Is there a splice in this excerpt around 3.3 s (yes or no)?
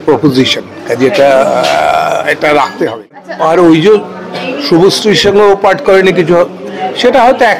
yes